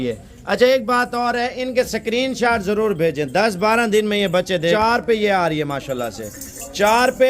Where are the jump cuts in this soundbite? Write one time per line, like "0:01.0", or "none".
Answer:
0:04.7